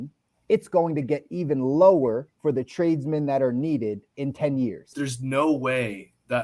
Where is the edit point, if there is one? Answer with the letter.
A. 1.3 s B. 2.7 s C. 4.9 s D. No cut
C